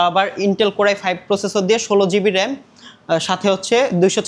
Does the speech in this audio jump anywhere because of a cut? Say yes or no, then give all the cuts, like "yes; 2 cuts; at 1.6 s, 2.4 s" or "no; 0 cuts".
no; 0 cuts